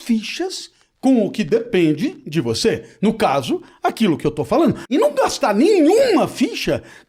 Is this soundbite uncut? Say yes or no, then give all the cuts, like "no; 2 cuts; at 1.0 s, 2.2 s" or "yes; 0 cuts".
no; 1 cut; at 4.8 s